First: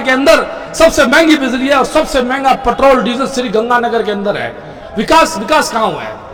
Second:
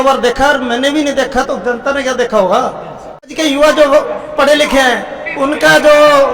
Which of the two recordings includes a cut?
second; 1 cut; at 3.3 s

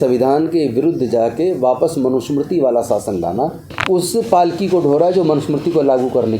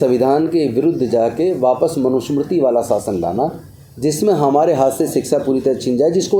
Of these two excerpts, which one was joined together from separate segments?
first; 1 cut; at 3.7 s

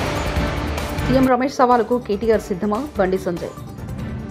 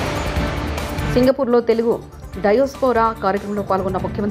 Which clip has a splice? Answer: second; 1 cut; at 1.0 s

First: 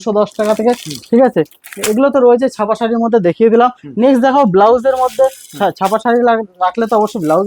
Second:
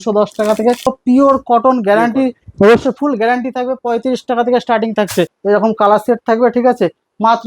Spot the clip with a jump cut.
second; 2 cuts; at 1.0 s, 5.3 s

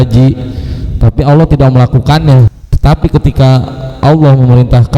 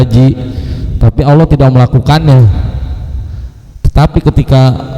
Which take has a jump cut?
first; 1 cut; at 2.6 s

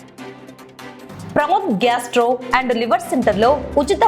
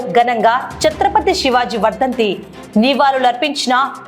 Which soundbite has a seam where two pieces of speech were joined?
first; 1 cut; at 1.1 s

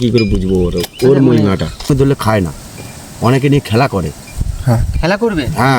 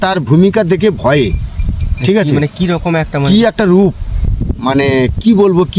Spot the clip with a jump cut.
first; 1 cut; at 1.9 s

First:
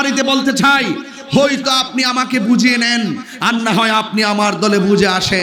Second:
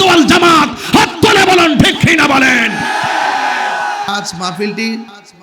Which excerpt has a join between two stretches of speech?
second; 1 cut; at 4.1 s

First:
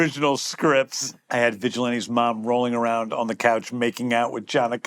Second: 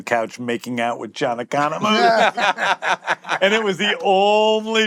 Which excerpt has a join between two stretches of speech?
first; 1 cut; at 1.2 s

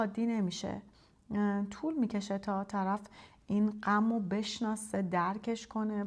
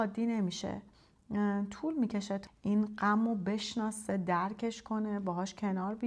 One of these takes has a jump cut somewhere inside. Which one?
second; 1 cut; at 2.4 s

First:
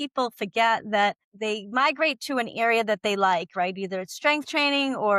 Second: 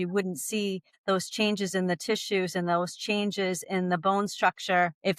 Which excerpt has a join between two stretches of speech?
first; 1 cut; at 1.3 s

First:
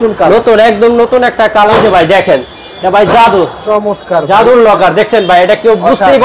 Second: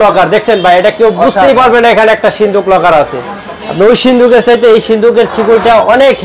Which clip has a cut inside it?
first; 2 cuts; at 1.7 s, 2.7 s

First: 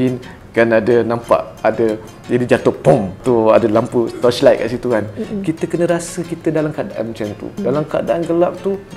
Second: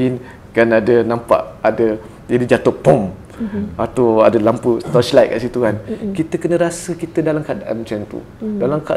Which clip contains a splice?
first; 2 cuts; at 3.1 s, 7.6 s

